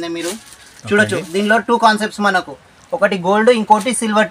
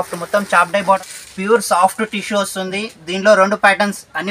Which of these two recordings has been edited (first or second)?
second